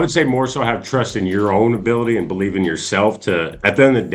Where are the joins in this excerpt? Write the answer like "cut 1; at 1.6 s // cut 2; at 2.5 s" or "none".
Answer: none